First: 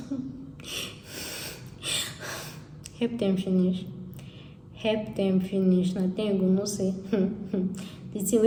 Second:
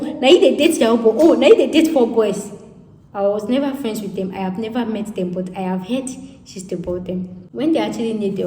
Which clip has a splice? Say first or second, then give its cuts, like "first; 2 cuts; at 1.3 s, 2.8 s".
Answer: second; 1 cut; at 7.4 s